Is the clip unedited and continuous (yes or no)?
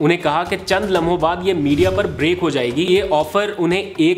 no